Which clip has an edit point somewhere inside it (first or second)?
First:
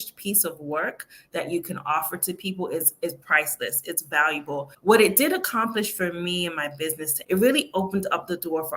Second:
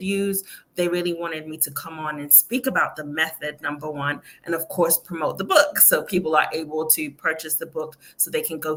first